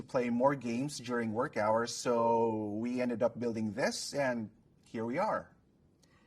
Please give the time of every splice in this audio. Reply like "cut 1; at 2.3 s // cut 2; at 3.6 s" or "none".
cut 1; at 3.7 s